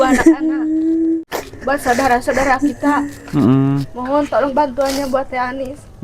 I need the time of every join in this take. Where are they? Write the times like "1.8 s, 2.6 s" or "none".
1.2 s

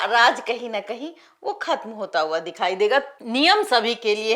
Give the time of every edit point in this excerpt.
3.1 s

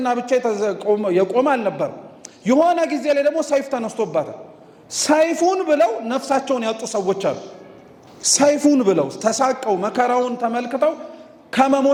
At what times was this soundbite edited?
none

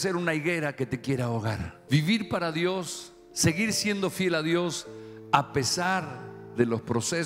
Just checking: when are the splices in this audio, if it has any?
1.7 s

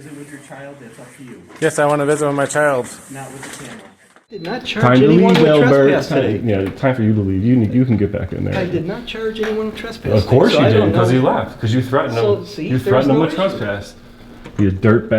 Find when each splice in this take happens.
4.5 s

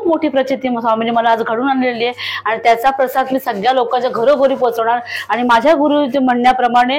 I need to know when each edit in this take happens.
none

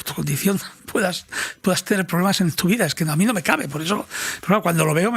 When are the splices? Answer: none

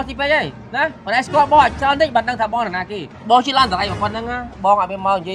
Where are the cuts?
3.1 s

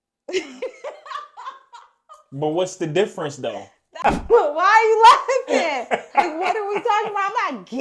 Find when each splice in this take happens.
3.8 s

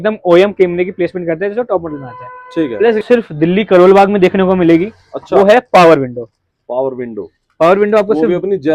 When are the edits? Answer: 3.0 s

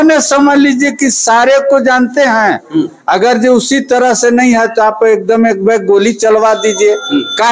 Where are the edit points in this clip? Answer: none

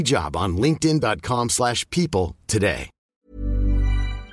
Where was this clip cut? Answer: 3.2 s

